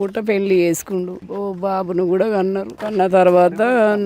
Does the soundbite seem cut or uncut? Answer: cut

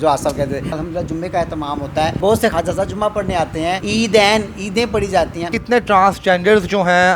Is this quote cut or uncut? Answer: cut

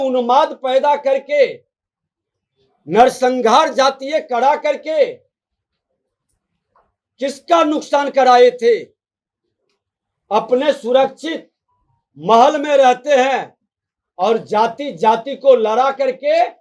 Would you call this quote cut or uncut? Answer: uncut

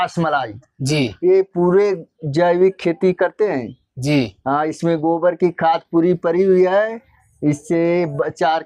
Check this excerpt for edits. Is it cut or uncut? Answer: uncut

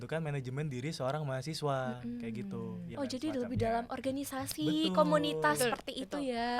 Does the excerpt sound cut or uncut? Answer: cut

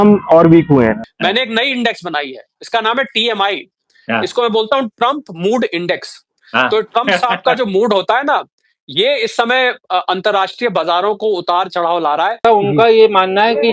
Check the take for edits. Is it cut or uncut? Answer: cut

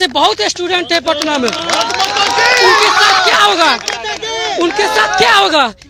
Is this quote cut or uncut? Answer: uncut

